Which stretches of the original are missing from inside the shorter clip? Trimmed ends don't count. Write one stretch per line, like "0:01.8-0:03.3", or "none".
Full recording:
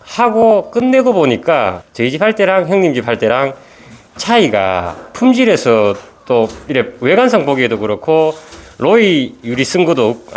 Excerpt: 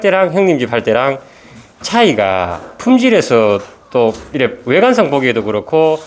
none